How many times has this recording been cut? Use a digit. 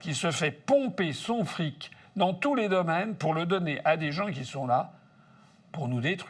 0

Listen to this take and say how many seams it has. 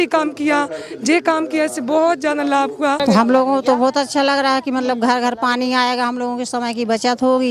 1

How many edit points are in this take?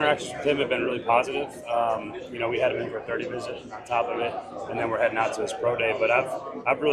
0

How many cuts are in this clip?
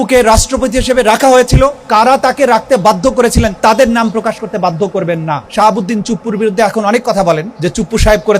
4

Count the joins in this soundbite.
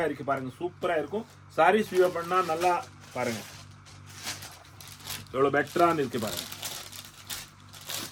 0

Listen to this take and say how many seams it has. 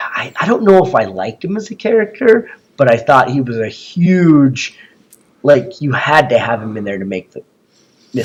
0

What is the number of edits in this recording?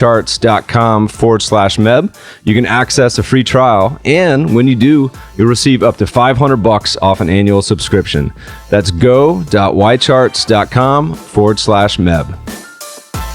1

